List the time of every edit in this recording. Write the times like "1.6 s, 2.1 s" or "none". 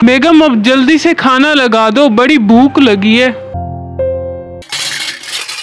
3.5 s, 4.7 s